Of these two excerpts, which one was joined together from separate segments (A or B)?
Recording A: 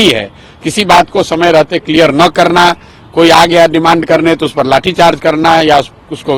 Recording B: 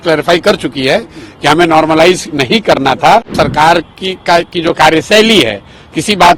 B